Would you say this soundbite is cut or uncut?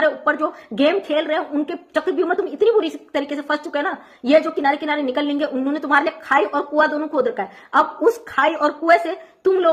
uncut